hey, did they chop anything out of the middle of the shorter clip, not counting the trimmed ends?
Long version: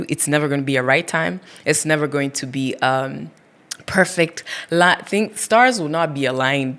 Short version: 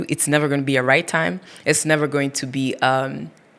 no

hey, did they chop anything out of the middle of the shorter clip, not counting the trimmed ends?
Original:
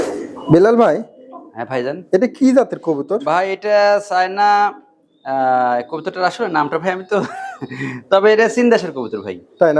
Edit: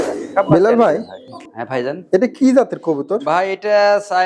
no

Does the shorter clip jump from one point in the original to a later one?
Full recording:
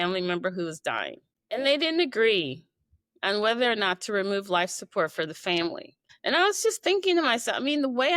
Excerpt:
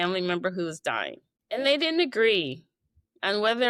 no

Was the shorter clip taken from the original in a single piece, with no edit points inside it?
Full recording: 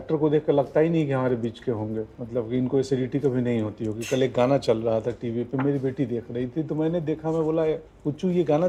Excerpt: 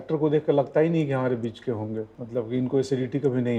yes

